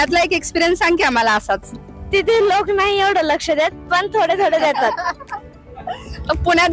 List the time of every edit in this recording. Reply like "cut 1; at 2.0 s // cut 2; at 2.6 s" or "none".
none